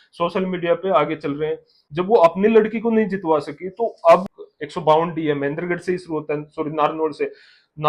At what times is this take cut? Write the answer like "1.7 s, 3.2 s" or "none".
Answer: 1.8 s, 4.3 s